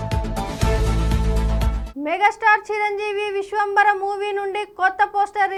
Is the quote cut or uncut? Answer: uncut